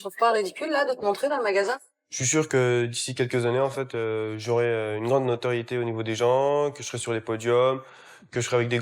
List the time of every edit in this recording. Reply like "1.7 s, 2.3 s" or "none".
1.8 s